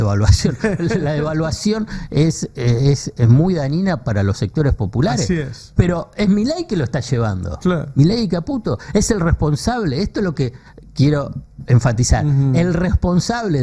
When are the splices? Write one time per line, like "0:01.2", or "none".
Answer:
none